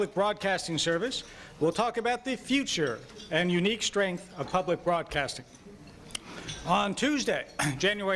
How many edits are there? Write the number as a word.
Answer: zero